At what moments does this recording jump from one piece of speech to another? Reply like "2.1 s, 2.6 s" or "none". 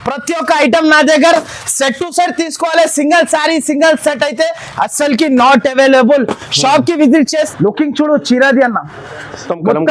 7.5 s